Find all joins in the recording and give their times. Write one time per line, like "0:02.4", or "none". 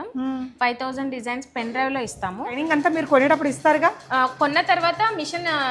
0:02.6